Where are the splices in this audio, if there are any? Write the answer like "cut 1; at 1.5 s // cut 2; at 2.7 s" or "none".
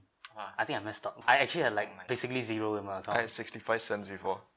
cut 1; at 1.2 s // cut 2; at 2.0 s